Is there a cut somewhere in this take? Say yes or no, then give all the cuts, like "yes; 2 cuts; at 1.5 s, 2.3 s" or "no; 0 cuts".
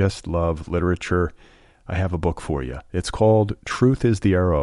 no; 0 cuts